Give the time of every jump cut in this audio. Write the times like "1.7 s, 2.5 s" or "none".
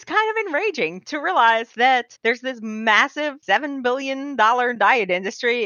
2.1 s, 3.4 s